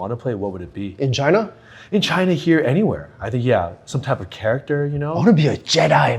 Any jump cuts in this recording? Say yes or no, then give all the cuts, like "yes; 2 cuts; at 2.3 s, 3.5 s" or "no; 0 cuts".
no; 0 cuts